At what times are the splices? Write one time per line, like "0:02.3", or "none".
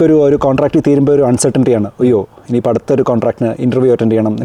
none